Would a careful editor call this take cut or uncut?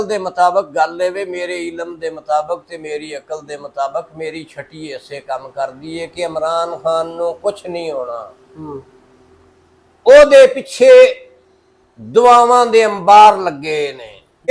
uncut